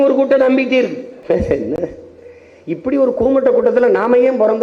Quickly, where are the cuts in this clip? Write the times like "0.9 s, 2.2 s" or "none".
1.1 s